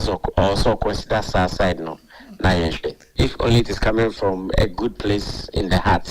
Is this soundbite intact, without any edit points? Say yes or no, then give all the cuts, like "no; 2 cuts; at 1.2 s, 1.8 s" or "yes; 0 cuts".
no; 1 cut; at 3.0 s